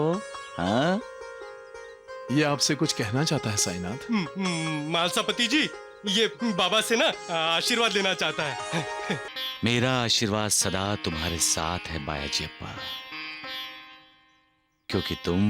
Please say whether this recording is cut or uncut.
cut